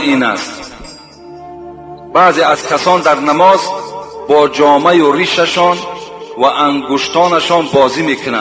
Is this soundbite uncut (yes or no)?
yes